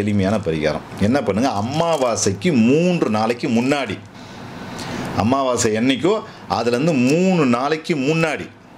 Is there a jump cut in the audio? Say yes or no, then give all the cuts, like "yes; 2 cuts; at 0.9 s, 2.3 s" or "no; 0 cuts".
no; 0 cuts